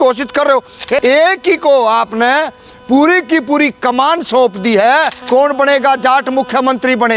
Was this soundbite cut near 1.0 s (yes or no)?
yes